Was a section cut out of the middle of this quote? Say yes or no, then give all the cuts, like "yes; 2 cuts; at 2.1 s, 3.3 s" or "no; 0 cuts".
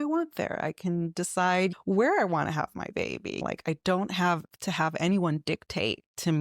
yes; 2 cuts; at 1.7 s, 3.4 s